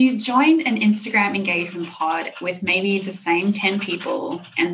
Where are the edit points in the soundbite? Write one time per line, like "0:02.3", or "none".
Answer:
none